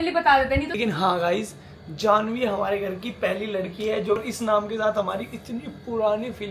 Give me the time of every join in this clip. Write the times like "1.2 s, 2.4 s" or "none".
0.8 s, 4.2 s